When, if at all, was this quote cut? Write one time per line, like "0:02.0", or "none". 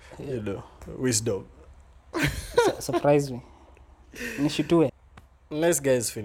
0:04.9

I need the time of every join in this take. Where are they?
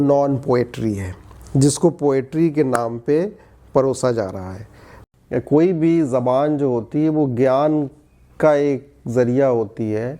0:04.9

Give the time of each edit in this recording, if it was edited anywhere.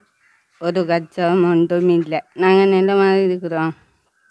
0:02.3

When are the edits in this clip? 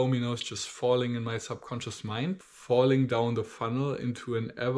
0:02.4

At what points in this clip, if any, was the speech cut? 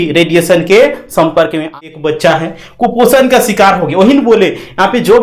0:01.7

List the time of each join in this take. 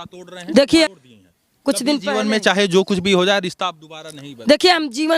0:00.9

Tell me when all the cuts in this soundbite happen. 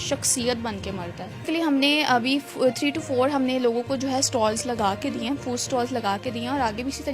0:01.5

